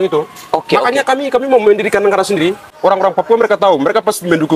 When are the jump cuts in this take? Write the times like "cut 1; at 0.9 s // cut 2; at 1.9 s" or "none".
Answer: cut 1; at 2.8 s

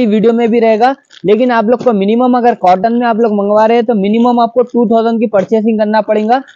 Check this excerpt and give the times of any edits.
none

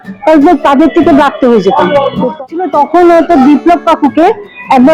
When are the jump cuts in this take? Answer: cut 1; at 2.3 s

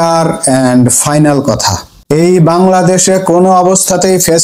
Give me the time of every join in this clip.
cut 1; at 1.9 s

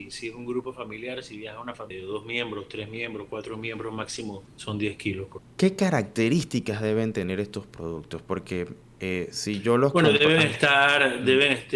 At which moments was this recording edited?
cut 1; at 1.9 s // cut 2; at 4.5 s // cut 3; at 5.4 s // cut 4; at 8.8 s

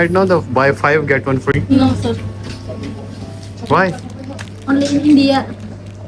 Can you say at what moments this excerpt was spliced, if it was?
none

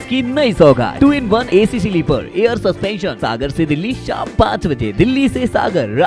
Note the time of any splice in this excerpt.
cut 1; at 1.1 s // cut 2; at 3.2 s

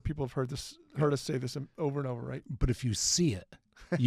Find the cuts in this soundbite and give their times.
none

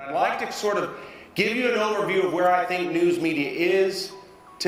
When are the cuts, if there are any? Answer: none

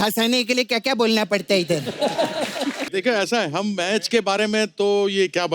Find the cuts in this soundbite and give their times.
cut 1; at 2.8 s

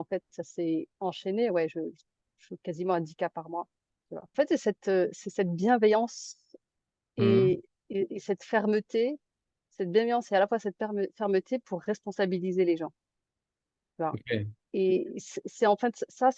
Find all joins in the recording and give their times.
cut 1; at 4.3 s

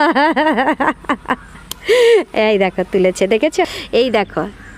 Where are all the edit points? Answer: cut 1; at 3.7 s

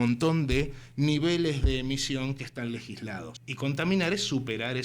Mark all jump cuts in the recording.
cut 1; at 3.4 s

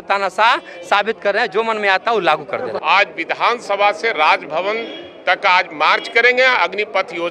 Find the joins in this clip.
cut 1; at 2.7 s

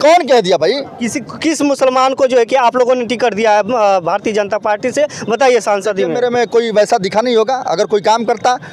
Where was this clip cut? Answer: none

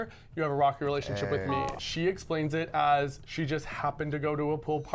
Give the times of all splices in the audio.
cut 1; at 1.8 s

